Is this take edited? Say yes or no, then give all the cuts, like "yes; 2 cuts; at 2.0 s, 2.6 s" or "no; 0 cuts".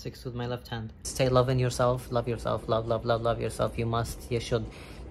yes; 1 cut; at 1.0 s